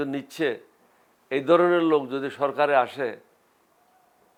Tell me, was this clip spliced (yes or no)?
no